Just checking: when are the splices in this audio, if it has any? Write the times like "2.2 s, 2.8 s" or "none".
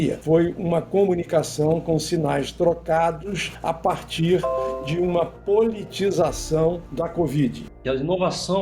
7.7 s